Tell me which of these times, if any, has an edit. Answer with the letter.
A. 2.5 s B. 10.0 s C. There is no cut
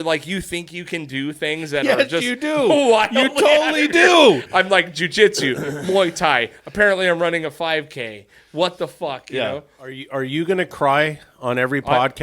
B